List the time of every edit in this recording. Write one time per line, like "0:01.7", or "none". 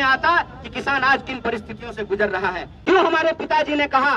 0:02.7